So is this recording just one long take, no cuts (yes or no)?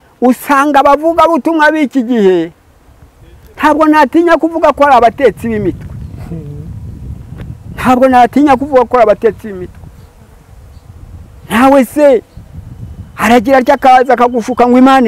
yes